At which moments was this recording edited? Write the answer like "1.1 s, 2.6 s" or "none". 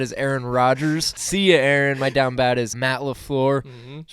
1.2 s, 2.8 s